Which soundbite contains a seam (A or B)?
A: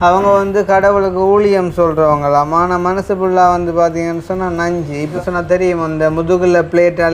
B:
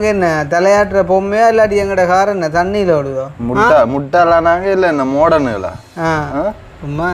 A